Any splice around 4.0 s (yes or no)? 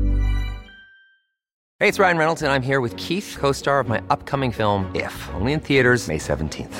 no